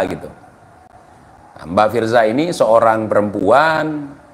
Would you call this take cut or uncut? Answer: uncut